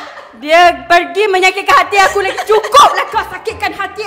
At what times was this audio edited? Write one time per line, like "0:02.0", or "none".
none